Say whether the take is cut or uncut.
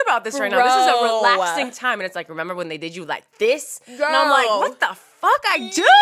uncut